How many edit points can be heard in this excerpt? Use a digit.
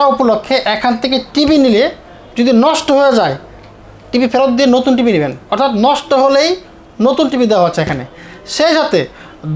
0